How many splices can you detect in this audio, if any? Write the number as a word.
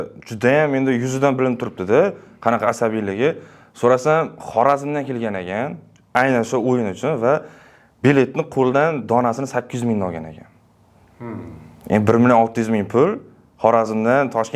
zero